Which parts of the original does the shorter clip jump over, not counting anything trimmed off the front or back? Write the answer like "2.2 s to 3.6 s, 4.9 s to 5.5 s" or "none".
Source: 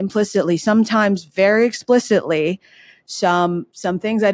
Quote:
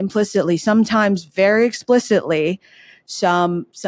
none